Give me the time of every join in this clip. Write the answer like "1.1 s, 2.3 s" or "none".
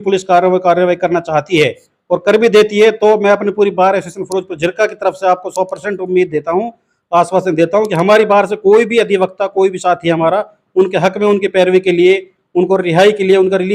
none